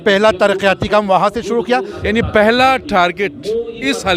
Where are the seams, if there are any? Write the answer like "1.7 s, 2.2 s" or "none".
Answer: 1.9 s

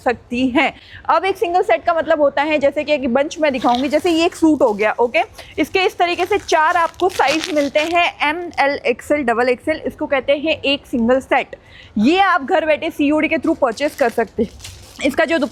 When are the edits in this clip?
none

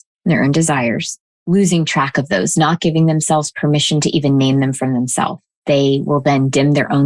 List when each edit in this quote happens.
5.6 s

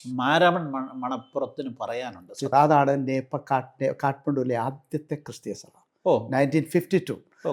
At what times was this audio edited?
2.5 s

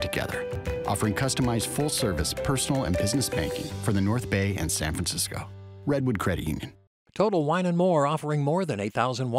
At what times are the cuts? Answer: 6.8 s

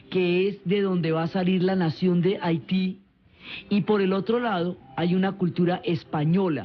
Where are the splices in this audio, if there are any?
2.9 s

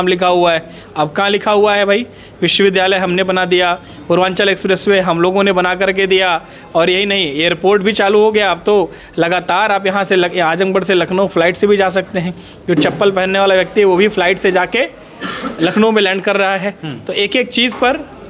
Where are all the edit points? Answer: none

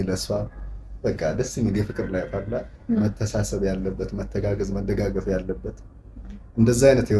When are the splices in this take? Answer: none

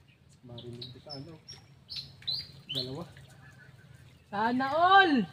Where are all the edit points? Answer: none

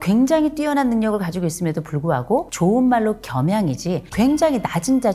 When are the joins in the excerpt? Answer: none

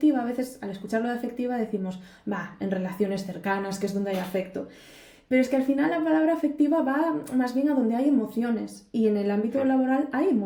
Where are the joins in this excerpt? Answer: none

